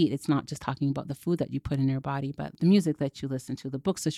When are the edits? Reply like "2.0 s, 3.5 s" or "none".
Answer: 2.4 s